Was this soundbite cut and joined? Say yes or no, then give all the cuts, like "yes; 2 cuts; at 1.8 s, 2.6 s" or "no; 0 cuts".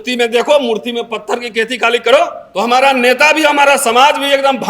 yes; 1 cut; at 2.5 s